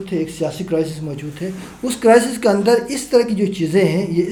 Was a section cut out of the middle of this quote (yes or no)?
no